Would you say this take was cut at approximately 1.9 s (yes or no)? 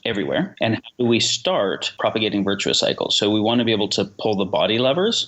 yes